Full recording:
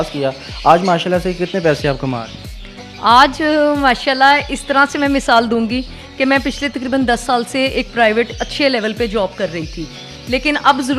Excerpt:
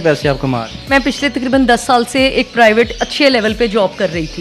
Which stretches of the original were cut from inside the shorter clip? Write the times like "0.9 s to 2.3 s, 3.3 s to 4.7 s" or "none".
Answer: 2.5 s to 6.3 s